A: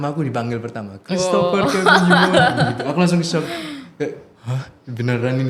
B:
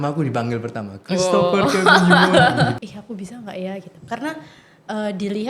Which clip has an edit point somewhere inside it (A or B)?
B